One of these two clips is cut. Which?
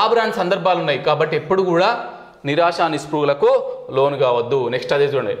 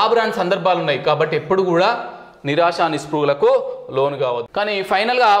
second; 1 cut; at 4.4 s

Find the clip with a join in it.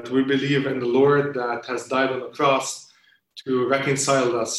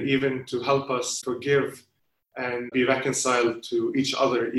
second; 2 cuts; at 1.2 s, 2.7 s

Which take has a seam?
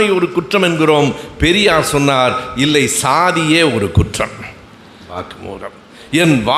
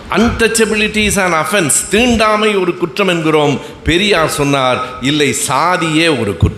first; 1 cut; at 5.2 s

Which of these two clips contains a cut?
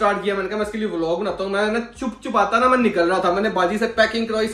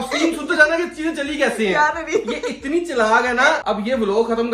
second; 1 cut; at 3.6 s

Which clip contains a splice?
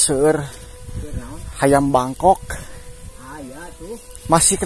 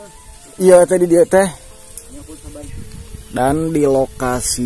second; 1 cut; at 2.8 s

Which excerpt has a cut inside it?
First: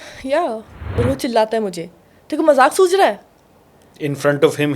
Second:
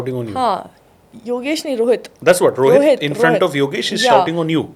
first; 1 cut; at 1.0 s

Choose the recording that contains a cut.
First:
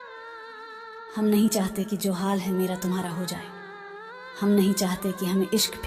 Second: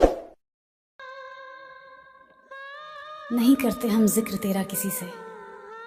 first; 1 cut; at 1.1 s

